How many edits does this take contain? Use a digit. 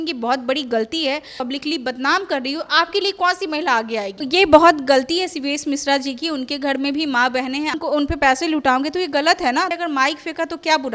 4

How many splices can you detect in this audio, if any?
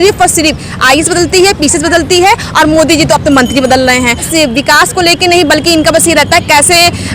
1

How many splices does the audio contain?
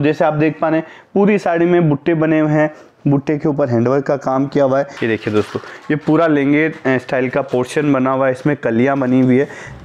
1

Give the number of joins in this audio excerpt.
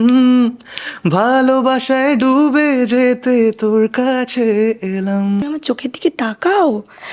1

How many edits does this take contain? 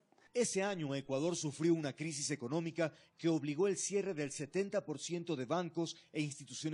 1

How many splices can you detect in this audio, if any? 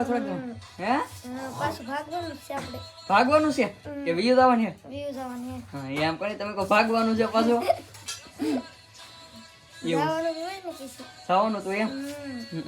0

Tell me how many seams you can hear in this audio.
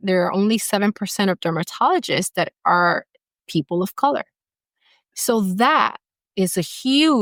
0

